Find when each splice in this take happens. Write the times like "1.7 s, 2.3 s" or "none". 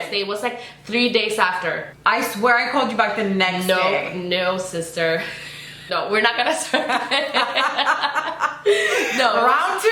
1.9 s, 5.7 s